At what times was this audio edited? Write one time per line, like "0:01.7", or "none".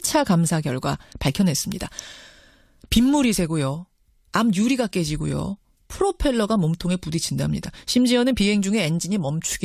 none